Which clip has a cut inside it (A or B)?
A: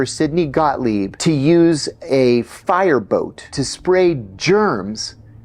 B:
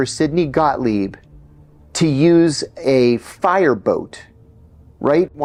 A